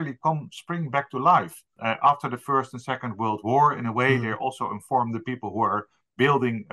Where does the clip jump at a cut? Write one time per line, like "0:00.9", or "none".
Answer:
0:01.8